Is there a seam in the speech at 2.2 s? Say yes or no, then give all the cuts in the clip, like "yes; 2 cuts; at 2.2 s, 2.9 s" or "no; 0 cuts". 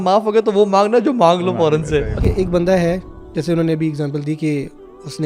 yes; 1 cut; at 2.2 s